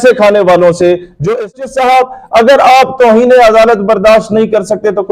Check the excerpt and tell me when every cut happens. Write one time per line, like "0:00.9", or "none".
0:01.5